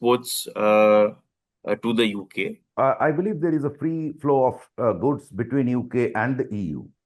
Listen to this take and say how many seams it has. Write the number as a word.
one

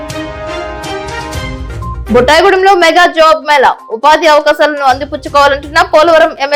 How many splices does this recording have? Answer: zero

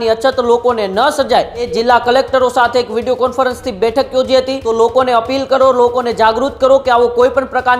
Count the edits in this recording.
two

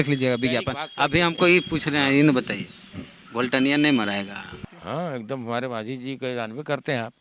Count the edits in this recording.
one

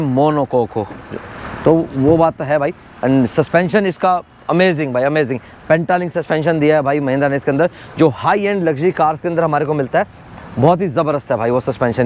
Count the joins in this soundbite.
zero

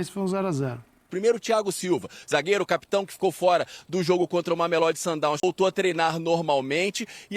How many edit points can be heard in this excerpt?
two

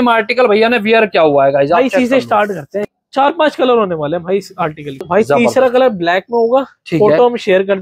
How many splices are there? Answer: two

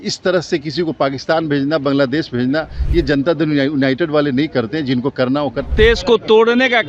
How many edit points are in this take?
one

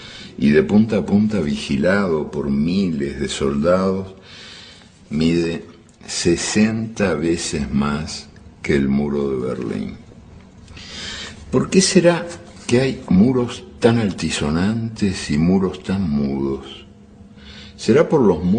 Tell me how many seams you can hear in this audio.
one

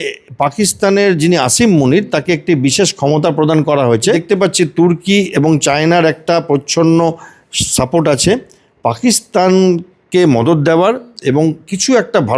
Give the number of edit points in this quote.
one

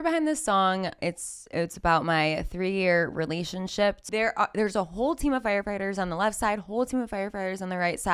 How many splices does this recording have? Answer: two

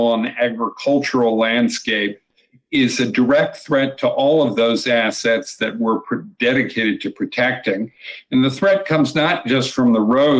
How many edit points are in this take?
zero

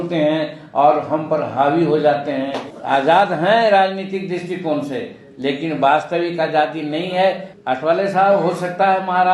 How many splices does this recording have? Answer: two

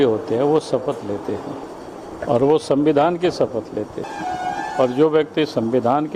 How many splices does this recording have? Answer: two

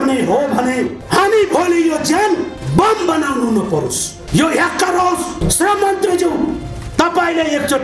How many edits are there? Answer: four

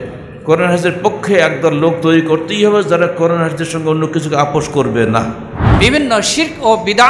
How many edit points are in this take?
one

